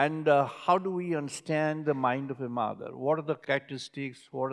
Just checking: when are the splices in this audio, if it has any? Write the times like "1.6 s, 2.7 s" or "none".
3.4 s